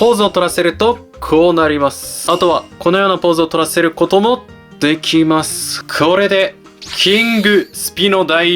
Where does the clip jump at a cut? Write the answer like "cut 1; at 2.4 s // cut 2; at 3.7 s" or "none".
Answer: cut 1; at 2.1 s // cut 2; at 5.7 s